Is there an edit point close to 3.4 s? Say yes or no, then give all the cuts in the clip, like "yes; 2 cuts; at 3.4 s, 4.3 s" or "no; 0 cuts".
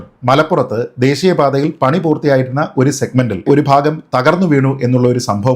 yes; 1 cut; at 3.4 s